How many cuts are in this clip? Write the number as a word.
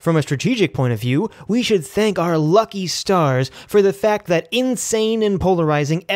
zero